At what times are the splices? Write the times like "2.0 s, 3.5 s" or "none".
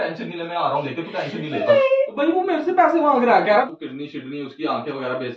2.1 s, 3.7 s